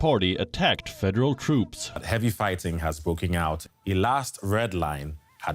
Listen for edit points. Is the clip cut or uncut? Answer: cut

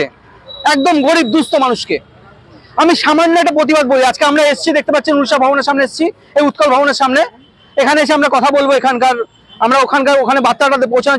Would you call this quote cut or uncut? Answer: uncut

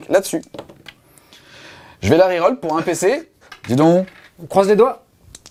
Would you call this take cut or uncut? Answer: uncut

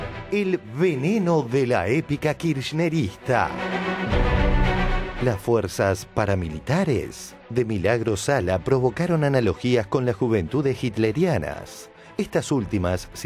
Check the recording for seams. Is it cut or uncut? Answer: uncut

